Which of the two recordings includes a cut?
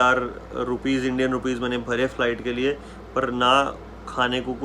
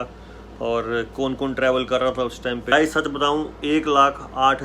second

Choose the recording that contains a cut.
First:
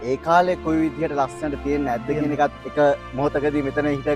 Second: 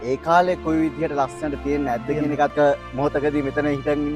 second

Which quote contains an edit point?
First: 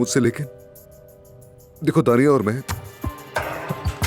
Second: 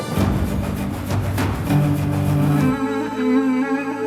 second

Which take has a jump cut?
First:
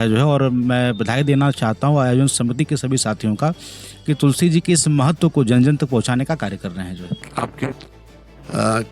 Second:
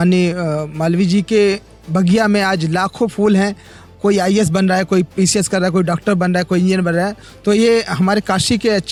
first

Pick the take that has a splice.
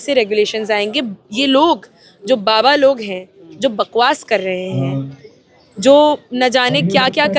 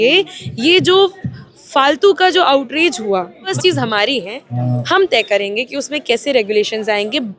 second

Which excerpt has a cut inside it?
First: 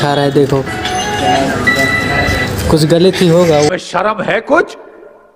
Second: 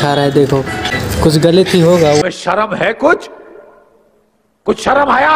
second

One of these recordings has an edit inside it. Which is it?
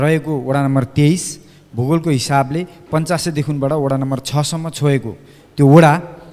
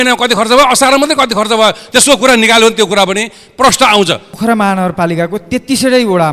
second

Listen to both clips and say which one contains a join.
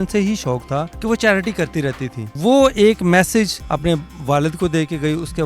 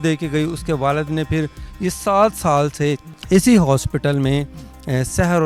first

